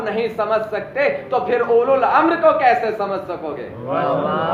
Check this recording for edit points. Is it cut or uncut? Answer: uncut